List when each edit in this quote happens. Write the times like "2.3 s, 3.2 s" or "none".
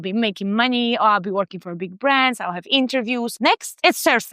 3.3 s